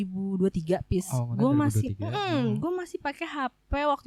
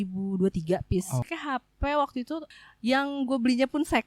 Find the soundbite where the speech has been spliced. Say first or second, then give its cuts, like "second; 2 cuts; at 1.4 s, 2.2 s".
second; 2 cuts; at 1.3 s, 2.5 s